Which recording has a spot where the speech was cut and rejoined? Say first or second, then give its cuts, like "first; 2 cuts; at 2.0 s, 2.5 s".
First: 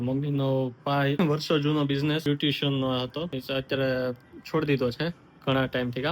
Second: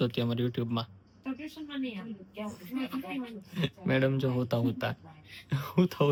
first; 3 cuts; at 1.2 s, 2.2 s, 3.3 s